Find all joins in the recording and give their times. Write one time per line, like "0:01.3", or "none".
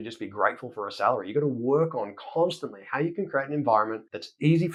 none